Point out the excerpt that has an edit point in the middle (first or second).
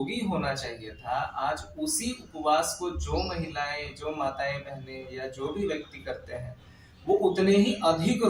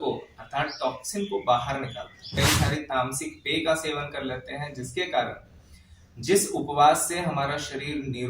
second